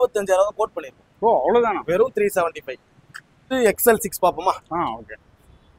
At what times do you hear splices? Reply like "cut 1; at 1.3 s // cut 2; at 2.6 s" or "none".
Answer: cut 1; at 3.4 s